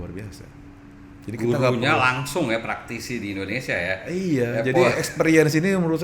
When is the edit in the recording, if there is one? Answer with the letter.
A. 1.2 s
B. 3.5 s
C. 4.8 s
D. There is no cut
D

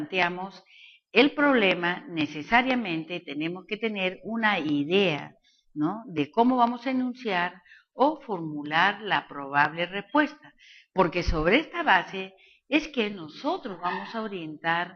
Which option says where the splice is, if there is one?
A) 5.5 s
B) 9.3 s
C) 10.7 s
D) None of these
A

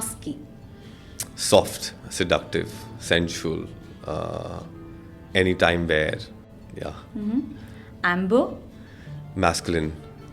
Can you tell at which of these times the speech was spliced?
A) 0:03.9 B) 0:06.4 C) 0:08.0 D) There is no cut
B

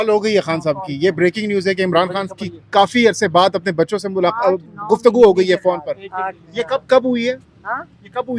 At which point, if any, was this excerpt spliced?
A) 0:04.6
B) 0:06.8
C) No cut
C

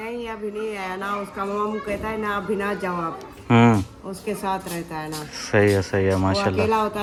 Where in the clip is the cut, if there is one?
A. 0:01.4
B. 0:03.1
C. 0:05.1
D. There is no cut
D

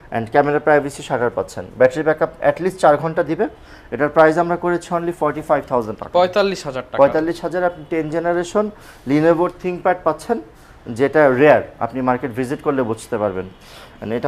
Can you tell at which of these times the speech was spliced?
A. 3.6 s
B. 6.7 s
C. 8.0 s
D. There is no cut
D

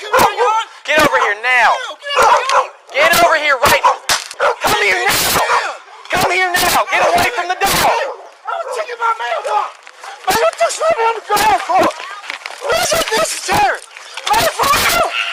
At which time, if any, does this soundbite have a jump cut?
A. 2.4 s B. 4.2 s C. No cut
B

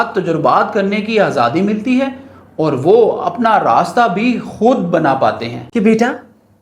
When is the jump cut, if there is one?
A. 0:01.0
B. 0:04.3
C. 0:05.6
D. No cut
C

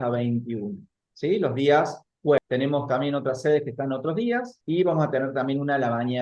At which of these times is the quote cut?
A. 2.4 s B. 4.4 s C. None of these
A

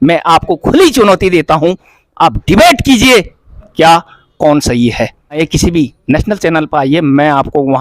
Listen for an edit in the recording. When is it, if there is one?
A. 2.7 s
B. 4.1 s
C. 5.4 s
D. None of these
C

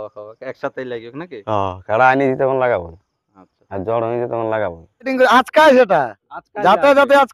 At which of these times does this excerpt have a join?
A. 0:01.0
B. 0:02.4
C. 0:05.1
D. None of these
C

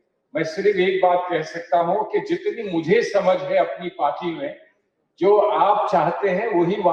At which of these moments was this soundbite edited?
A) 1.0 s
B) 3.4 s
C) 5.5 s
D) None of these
D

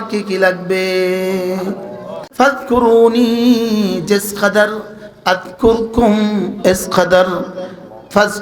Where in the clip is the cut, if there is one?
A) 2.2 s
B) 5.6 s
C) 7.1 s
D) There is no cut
A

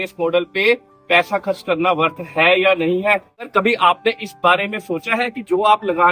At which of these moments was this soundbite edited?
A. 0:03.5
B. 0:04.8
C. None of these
A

